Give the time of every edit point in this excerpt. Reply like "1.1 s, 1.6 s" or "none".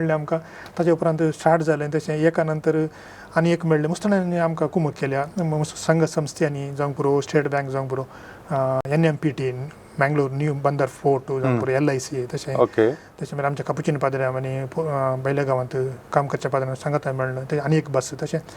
none